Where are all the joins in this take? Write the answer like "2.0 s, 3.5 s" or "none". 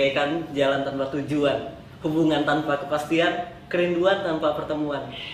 none